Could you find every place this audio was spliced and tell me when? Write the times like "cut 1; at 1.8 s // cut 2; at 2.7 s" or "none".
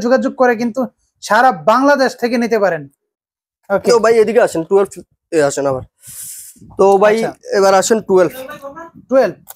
none